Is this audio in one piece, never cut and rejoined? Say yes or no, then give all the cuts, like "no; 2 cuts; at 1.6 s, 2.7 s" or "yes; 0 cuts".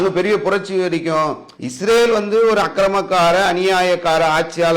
no; 1 cut; at 1.5 s